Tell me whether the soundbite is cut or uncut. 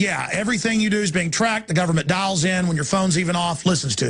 cut